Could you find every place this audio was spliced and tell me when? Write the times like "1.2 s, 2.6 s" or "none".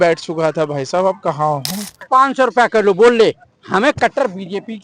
2.0 s